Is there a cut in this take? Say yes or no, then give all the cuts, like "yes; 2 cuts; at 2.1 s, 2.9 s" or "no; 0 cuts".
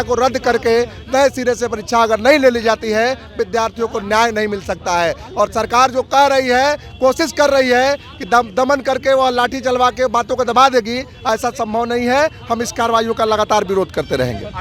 no; 0 cuts